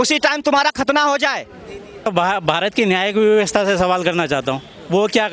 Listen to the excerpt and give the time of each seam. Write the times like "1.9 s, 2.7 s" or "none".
2.1 s